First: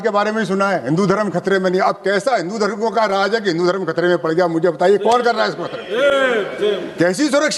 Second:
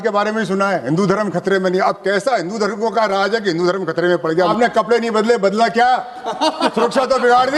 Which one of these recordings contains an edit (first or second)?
second